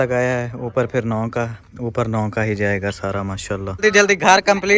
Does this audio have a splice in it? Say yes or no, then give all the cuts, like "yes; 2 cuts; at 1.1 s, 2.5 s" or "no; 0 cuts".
yes; 1 cut; at 3.8 s